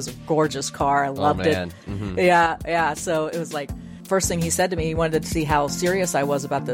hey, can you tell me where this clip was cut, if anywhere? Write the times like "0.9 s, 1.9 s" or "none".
3.9 s